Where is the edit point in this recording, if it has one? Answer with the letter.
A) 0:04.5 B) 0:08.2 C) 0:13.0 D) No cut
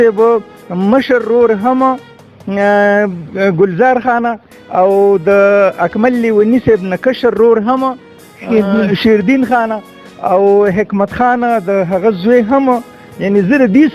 D